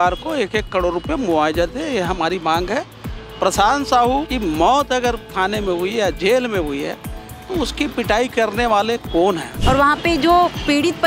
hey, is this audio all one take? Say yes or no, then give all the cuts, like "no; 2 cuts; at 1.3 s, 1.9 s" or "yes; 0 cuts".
no; 2 cuts; at 4.3 s, 9.5 s